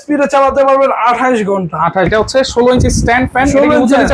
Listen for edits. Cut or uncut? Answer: cut